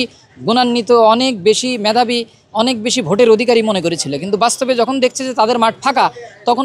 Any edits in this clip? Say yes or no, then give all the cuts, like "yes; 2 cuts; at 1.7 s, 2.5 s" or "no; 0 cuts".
no; 0 cuts